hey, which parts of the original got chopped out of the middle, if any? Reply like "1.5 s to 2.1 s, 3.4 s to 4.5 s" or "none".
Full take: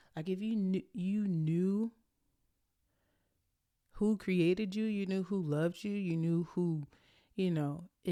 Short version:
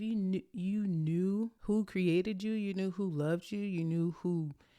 2.0 s to 3.9 s

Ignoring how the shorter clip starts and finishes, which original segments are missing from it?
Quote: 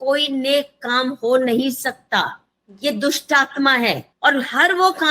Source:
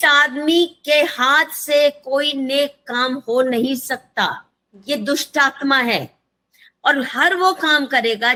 6.1 s to 6.7 s

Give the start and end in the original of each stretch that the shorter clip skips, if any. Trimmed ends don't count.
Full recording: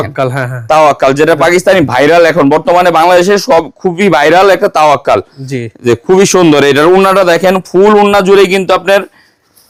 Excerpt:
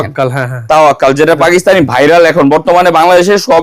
none

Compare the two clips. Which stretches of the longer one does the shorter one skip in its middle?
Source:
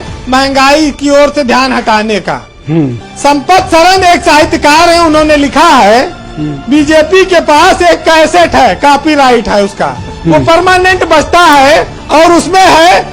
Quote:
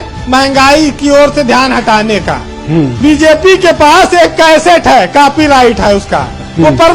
2.9 s to 6.6 s

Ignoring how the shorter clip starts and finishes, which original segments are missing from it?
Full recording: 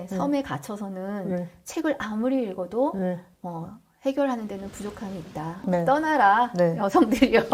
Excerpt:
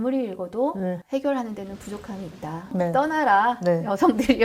3.2 s to 3.9 s

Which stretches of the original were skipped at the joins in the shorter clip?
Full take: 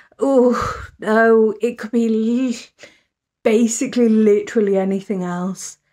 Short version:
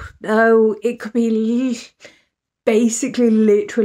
none

